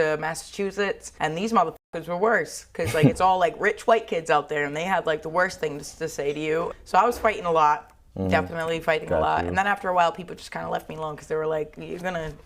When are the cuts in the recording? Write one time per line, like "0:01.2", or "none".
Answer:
0:01.1
0:06.7